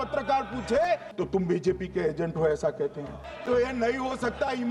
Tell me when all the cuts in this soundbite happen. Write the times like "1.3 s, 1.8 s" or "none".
1.1 s, 3.3 s